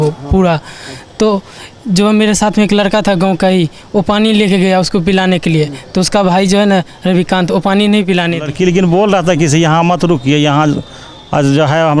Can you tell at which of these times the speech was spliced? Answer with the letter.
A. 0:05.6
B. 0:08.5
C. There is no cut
B